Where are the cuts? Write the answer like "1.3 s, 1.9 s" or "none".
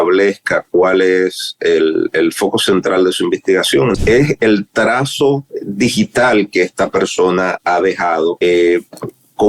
4.0 s, 5.6 s, 8.4 s